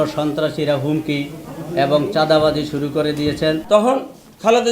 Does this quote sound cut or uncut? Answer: cut